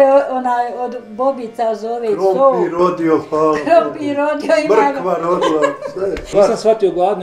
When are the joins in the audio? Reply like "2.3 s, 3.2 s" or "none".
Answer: 6.3 s